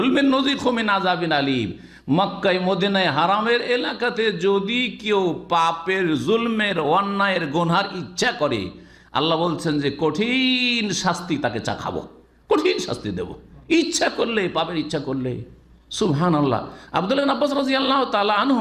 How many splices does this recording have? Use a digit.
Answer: 0